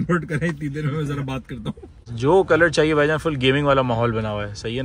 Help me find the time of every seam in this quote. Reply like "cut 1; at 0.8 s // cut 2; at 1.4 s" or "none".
cut 1; at 2.0 s

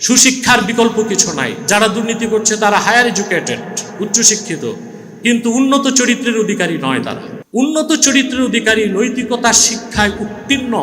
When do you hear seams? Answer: cut 1; at 7.3 s

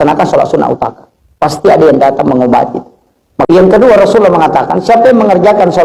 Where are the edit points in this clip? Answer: cut 1; at 3.5 s

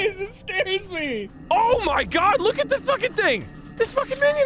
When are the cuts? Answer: cut 1; at 1.3 s // cut 2; at 3.6 s

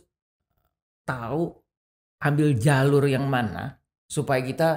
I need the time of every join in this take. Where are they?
none

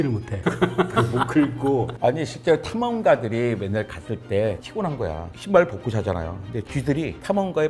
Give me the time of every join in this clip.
cut 1; at 1.9 s // cut 2; at 5.3 s

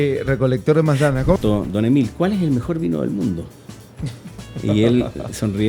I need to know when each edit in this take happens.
cut 1; at 1.4 s

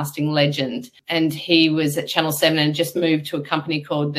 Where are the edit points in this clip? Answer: cut 1; at 1.0 s

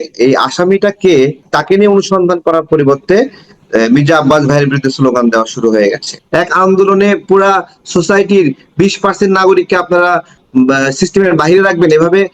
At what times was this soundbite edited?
cut 1; at 1.5 s // cut 2; at 6.1 s

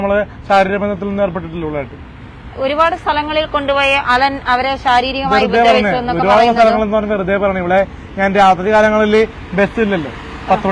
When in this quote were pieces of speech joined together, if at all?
none

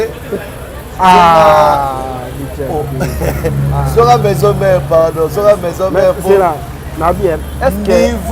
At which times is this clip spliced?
none

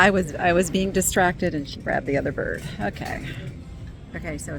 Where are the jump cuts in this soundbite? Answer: cut 1; at 3.6 s

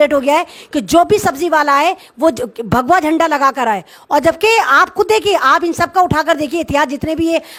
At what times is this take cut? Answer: none

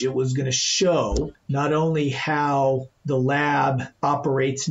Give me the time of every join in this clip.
cut 1; at 1.4 s // cut 2; at 2.9 s // cut 3; at 3.9 s

